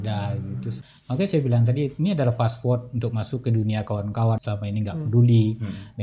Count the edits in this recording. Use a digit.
2